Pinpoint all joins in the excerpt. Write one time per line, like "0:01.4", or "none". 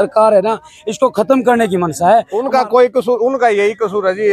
0:02.4

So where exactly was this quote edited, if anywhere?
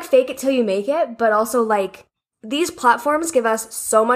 none

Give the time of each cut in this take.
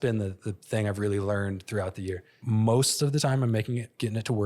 0:02.3

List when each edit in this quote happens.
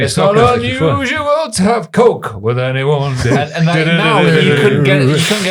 none

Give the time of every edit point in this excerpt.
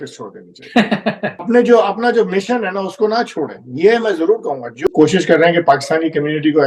0:01.5
0:04.9

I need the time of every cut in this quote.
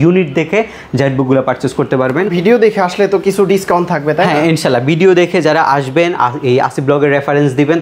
0:02.3

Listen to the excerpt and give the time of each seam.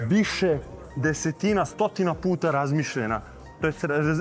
none

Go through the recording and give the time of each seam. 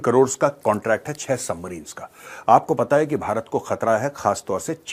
none

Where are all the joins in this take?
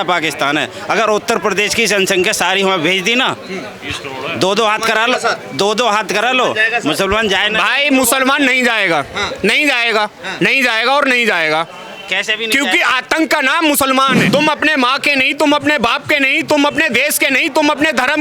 0:14.3

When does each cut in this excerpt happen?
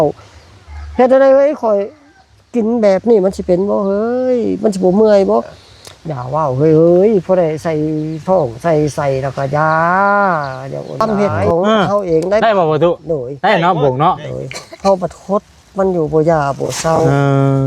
0:11.0

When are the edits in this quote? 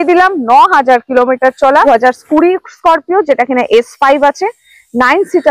0:01.9

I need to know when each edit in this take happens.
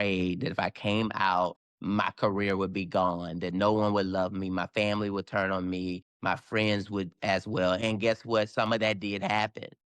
0:01.7

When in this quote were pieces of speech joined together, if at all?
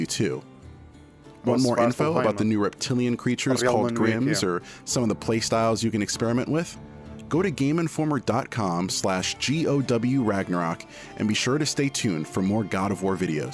none

